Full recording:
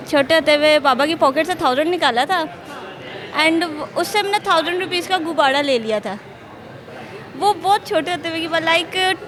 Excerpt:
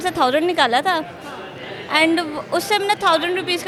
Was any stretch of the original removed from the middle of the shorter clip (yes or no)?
no